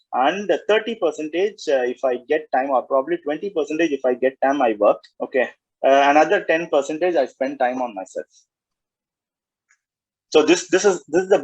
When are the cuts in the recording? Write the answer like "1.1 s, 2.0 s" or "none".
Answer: 5.1 s

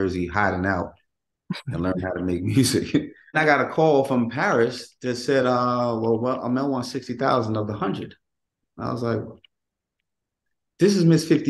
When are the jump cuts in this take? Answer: 3.4 s

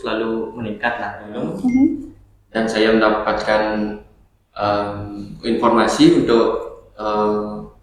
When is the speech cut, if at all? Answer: 1.6 s

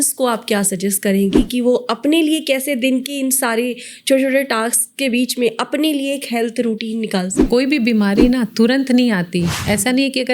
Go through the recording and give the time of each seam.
7.4 s

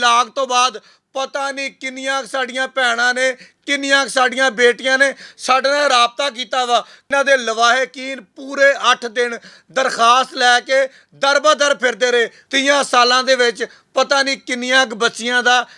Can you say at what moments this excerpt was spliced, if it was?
7.1 s, 12.4 s

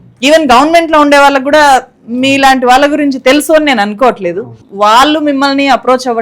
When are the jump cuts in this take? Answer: 4.5 s

